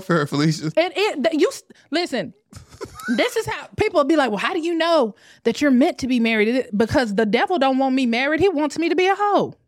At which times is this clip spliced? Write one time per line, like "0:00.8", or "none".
none

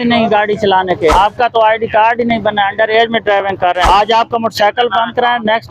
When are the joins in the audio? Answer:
0:01.1
0:03.8

